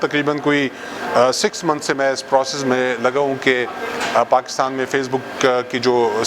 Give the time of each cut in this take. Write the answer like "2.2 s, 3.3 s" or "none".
none